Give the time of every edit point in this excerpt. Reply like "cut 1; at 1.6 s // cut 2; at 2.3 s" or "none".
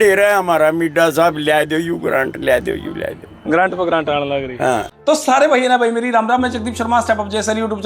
cut 1; at 4.9 s